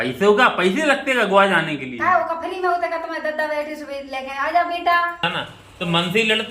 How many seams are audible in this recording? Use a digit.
1